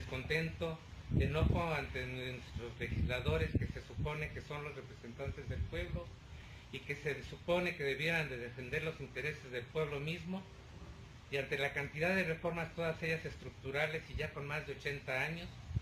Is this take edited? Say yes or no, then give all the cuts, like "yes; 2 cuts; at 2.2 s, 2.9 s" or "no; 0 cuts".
no; 0 cuts